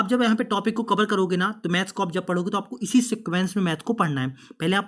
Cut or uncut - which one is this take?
uncut